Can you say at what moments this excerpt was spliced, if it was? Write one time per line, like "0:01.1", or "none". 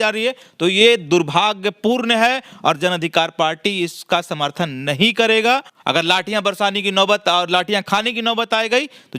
0:05.7